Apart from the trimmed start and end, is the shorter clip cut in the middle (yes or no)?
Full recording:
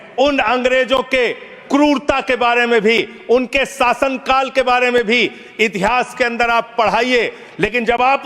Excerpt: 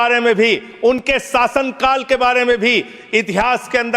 no